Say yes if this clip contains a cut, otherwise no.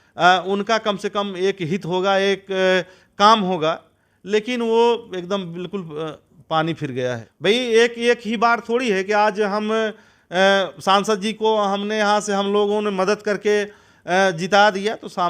yes